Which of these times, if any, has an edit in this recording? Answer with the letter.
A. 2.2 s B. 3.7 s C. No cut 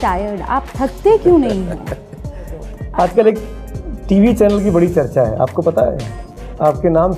C